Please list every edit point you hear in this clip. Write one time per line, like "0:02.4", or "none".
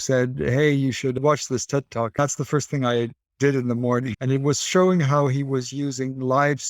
0:02.1
0:04.1